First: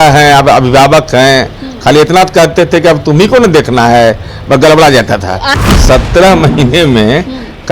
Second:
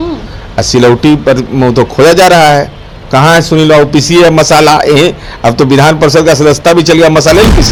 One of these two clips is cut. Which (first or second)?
first